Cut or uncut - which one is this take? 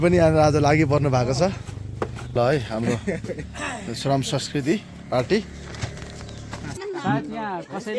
cut